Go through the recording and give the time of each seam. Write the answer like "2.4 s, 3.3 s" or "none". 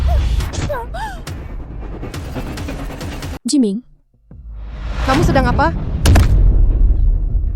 3.4 s